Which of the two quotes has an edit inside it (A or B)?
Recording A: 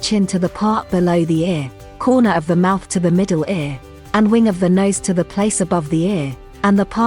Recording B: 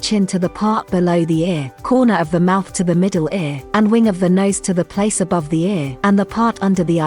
B